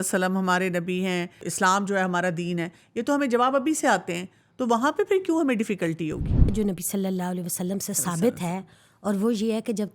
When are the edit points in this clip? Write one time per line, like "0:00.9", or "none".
0:01.5
0:06.5